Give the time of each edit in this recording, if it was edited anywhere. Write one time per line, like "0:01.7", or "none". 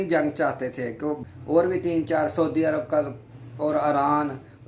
0:01.2